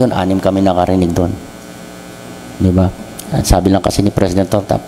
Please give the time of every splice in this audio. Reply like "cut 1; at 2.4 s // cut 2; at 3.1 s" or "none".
none